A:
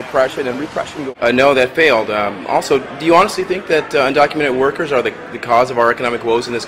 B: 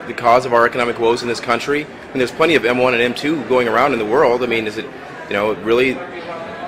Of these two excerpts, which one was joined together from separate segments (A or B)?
A